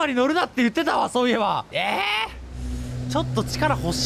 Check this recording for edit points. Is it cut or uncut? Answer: cut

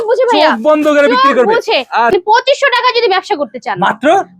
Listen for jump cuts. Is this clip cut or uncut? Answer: cut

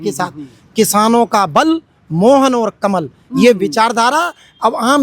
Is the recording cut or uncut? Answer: uncut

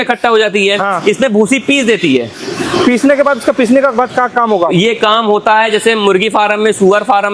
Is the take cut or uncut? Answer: uncut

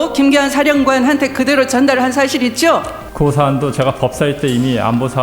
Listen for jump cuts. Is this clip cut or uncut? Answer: cut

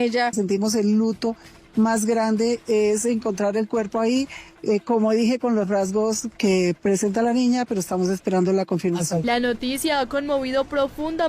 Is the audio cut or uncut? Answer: cut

